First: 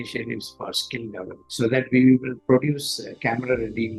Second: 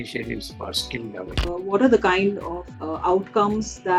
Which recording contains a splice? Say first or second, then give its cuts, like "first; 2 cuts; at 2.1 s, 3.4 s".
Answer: second; 1 cut; at 1.4 s